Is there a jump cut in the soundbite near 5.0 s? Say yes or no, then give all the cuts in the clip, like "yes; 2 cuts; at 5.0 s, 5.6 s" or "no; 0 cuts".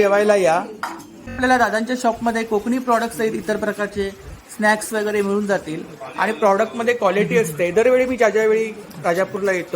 no; 1 cut; at 1.4 s